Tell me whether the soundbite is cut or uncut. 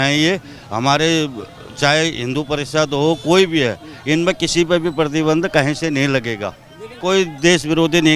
cut